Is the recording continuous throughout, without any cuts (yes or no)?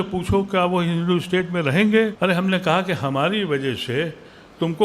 no